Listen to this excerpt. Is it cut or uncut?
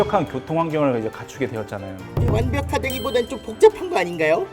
uncut